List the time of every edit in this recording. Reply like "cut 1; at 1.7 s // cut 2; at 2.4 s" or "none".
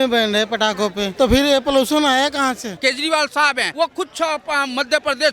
cut 1; at 1.0 s // cut 2; at 2.8 s // cut 3; at 3.7 s